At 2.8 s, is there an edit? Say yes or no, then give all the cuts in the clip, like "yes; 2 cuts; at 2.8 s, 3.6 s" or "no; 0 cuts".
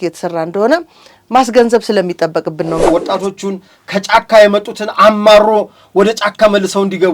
yes; 1 cut; at 2.8 s